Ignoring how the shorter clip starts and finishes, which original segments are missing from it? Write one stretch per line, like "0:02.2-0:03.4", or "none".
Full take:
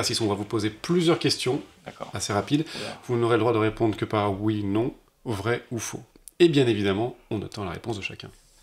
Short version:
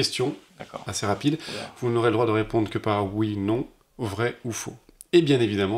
none

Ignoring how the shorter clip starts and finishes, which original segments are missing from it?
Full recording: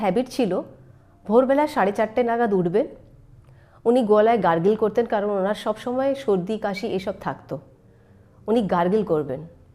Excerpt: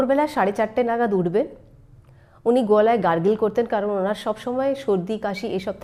none

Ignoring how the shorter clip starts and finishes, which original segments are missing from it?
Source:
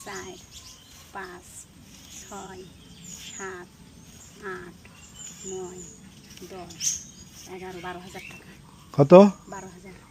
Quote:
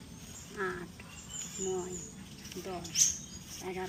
none

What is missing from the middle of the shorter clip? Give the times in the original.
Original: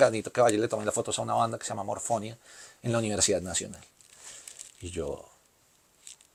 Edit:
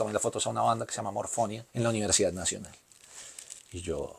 0:02.3-0:02.7

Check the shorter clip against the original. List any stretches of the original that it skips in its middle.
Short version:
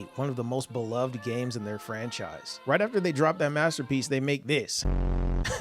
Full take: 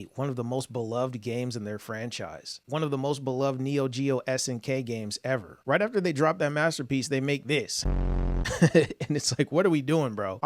0:02.5-0:05.5

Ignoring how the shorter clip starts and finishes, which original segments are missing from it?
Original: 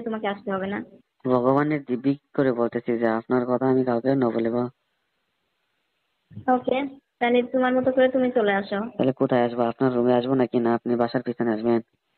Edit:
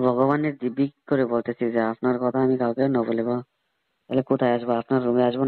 0:05.3-0:09.0

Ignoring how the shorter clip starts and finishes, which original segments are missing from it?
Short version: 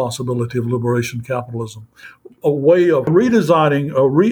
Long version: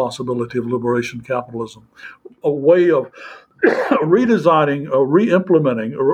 0:03.1-0:04.0

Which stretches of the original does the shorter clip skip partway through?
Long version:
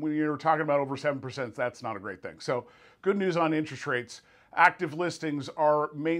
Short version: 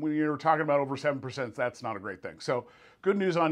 none

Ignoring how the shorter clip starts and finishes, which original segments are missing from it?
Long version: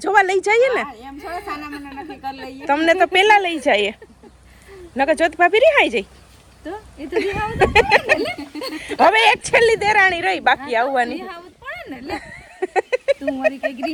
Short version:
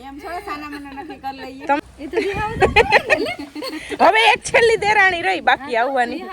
0:02.8-0:06.8

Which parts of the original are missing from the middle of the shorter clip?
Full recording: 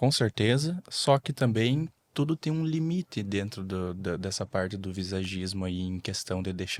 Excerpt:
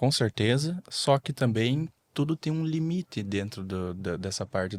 none

